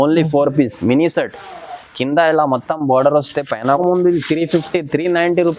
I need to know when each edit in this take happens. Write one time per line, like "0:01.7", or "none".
0:03.8

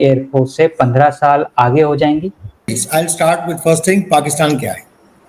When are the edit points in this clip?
0:02.8

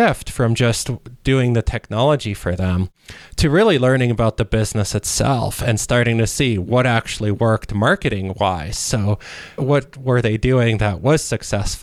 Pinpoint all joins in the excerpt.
0:09.6

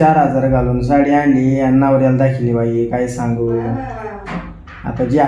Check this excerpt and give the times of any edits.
none

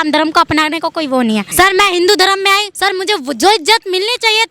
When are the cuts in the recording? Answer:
0:01.5
0:02.7

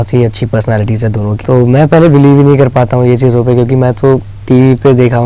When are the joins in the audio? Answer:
0:01.4

